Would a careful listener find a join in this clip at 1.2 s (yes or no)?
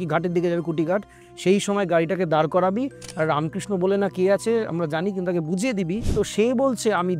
yes